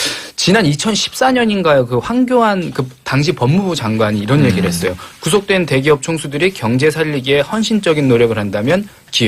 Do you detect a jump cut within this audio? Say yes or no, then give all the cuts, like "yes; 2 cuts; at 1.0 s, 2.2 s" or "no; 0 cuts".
no; 0 cuts